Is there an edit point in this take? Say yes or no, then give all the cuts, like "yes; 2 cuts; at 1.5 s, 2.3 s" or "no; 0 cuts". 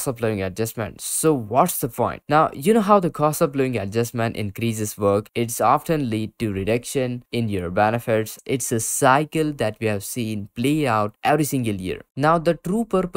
yes; 3 cuts; at 8.4 s, 11.1 s, 12.1 s